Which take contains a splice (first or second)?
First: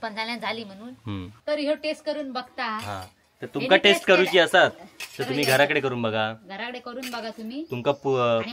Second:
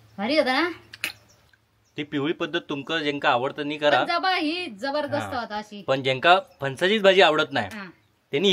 first